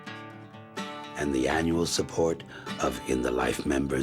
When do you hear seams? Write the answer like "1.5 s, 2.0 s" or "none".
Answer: 1.1 s